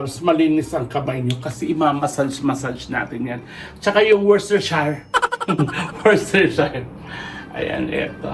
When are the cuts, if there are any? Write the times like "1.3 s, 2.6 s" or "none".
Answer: none